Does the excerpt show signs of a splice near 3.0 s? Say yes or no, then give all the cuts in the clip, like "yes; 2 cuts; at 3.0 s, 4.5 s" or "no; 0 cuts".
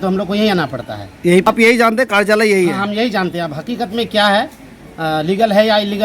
no; 1 cut; at 1.5 s